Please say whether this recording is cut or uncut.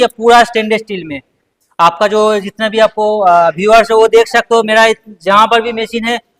uncut